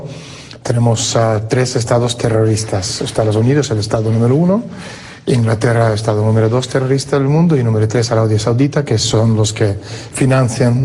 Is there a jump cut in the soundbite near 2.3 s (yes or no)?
no